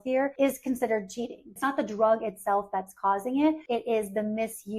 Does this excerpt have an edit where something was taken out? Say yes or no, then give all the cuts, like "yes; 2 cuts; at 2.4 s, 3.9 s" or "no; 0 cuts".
yes; 2 cuts; at 1.5 s, 3.6 s